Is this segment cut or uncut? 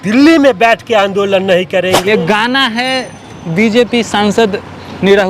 cut